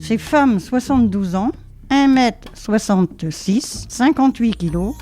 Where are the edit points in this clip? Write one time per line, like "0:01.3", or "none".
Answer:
0:01.7
0:03.8